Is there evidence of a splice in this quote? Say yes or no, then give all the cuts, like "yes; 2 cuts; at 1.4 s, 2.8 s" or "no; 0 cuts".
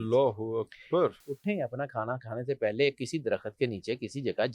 yes; 1 cut; at 1.2 s